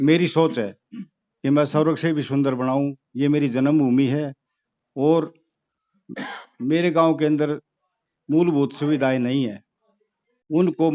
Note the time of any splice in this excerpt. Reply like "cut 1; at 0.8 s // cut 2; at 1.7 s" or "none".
none